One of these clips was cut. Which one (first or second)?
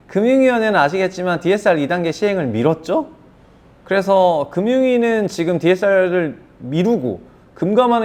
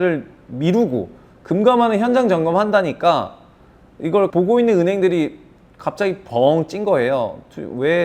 second